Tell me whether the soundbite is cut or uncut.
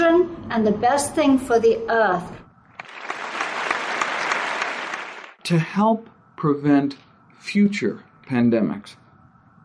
cut